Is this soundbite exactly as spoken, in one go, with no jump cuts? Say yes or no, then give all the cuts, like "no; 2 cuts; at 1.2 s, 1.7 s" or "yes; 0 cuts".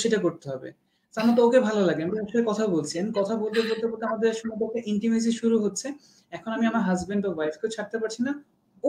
yes; 0 cuts